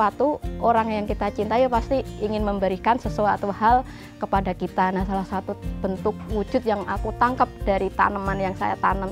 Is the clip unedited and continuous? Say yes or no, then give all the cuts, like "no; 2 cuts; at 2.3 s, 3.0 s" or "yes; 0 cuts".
yes; 0 cuts